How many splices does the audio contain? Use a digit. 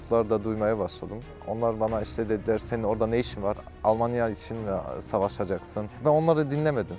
1